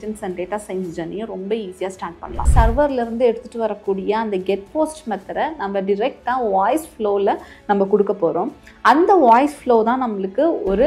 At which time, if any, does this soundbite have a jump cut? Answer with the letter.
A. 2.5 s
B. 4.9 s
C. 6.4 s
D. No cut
A